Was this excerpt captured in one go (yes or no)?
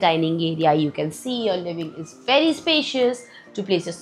yes